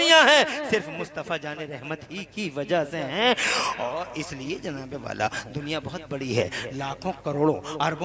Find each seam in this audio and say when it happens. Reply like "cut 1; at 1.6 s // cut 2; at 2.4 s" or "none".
cut 1; at 5.4 s